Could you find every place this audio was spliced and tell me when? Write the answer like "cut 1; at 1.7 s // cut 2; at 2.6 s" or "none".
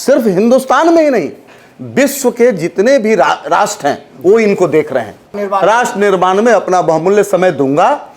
cut 1; at 5.4 s